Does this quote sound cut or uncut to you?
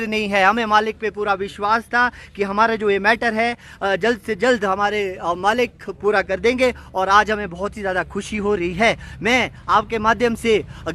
uncut